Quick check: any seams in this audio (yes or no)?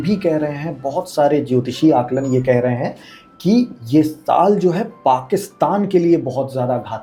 no